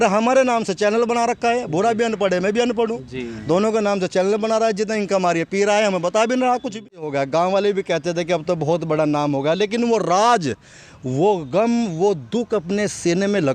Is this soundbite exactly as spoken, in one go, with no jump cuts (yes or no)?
no